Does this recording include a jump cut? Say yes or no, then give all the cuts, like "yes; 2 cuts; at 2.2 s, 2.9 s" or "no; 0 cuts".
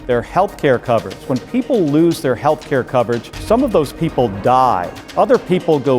yes; 3 cuts; at 1.3 s, 3.3 s, 5.0 s